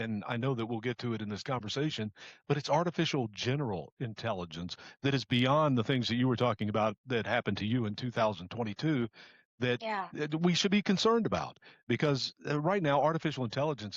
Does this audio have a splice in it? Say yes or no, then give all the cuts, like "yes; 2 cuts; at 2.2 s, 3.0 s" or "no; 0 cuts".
no; 0 cuts